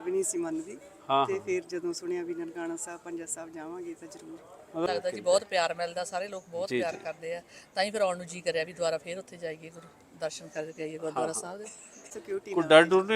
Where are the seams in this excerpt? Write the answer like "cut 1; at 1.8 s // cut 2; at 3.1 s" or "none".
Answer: cut 1; at 4.9 s // cut 2; at 12.2 s